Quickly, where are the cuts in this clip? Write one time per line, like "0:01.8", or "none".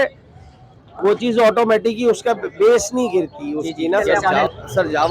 0:04.1